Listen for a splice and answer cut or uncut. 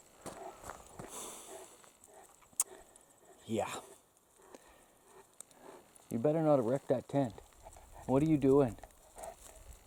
uncut